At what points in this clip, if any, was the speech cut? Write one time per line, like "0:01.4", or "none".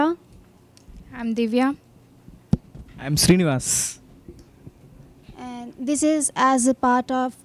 0:04.3